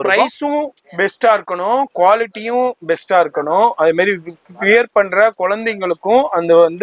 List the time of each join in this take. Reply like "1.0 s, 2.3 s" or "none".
none